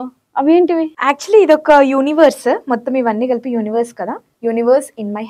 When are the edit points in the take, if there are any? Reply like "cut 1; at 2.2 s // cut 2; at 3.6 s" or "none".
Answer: cut 1; at 0.9 s // cut 2; at 4.2 s